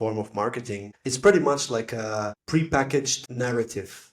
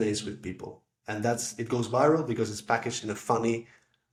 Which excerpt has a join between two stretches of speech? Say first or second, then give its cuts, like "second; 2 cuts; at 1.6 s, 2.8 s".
first; 3 cuts; at 0.9 s, 2.4 s, 3.2 s